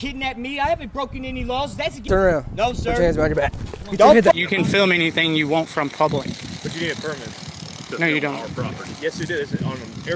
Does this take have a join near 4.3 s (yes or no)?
yes